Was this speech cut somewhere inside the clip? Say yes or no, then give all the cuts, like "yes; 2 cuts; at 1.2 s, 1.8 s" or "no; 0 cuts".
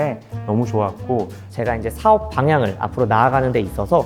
yes; 1 cut; at 1.4 s